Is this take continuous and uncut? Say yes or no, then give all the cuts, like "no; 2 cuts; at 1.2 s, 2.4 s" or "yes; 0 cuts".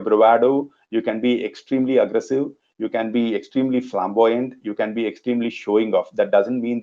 yes; 0 cuts